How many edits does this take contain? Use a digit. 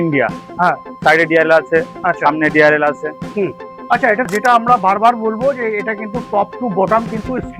1